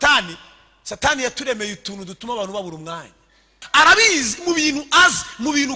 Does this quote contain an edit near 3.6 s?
yes; 1 cut; at 3.6 s

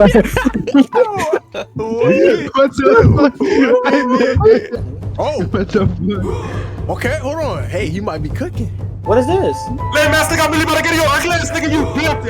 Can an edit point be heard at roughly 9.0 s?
yes; 2 cuts; at 4.8 s, 9.0 s

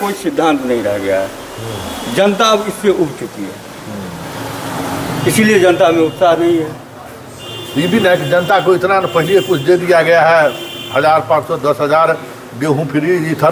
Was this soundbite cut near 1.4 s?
no; 0 cuts

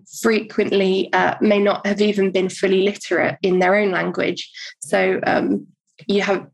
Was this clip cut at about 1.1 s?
no; 0 cuts

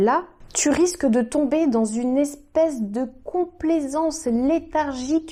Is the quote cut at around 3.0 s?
no; 0 cuts

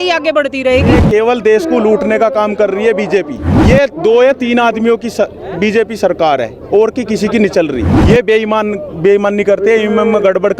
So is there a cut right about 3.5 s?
yes; 3 cuts; at 0.9 s, 3.5 s, 7.9 s

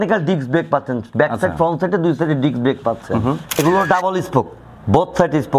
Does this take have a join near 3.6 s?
yes; 1 cut; at 3.6 s

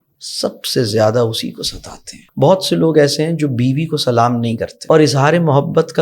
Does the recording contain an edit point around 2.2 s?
yes; 2 cuts; at 2.2 s, 4.7 s

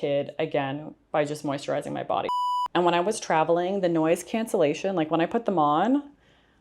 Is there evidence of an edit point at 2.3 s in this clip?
yes; 1 cut; at 2.3 s

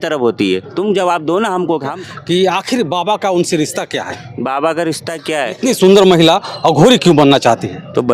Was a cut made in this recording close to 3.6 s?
no; 2 cuts; at 2.0 s, 5.7 s

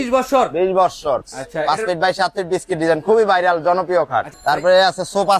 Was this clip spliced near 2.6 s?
no; 2 cuts; at 1.2 s, 4.3 s

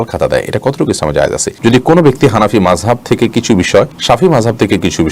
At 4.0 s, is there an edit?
yes; 2 cuts; at 1.6 s, 4.0 s

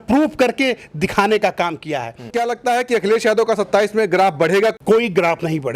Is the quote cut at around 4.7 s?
yes; 2 cuts; at 2.3 s, 4.7 s

